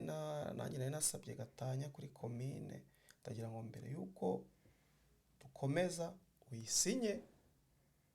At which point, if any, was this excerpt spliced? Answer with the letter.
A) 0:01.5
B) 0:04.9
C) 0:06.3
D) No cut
D